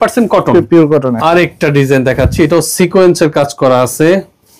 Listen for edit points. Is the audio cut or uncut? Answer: cut